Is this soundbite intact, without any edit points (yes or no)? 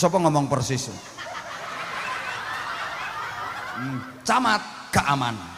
no